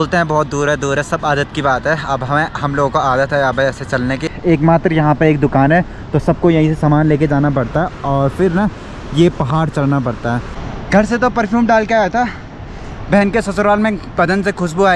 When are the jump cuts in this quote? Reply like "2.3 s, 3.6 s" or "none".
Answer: 4.3 s, 10.7 s